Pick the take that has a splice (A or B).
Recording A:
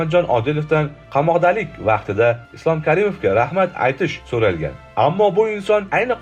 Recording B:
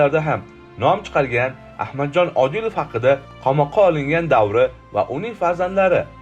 B